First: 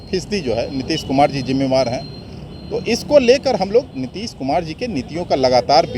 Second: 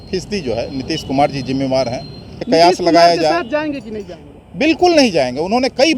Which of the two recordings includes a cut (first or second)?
second